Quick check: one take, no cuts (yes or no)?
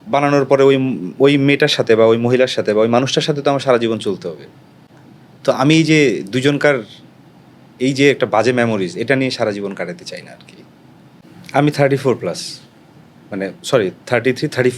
no